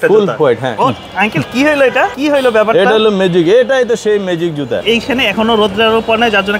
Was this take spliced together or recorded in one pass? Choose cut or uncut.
cut